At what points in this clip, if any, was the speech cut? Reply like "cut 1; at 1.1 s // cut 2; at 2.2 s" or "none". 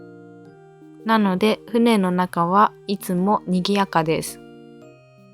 cut 1; at 4.2 s